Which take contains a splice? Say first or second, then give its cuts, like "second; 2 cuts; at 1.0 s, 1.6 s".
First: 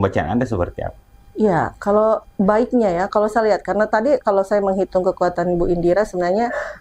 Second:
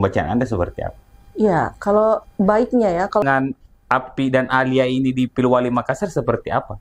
second; 1 cut; at 3.2 s